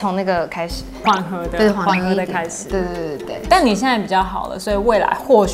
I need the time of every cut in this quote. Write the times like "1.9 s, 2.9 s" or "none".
3.4 s